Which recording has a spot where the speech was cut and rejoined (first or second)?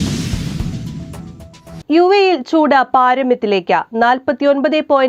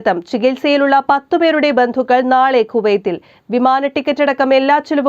first